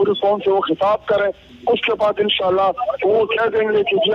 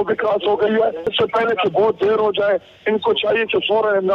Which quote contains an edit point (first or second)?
second